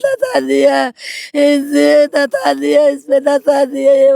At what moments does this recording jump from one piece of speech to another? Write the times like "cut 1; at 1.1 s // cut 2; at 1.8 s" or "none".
none